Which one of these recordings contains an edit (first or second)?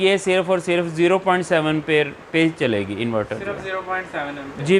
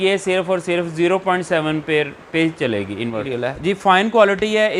second